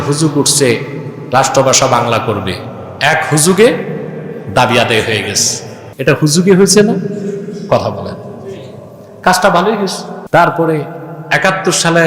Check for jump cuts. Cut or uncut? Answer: cut